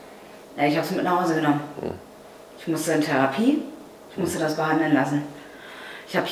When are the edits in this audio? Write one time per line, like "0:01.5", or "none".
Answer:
none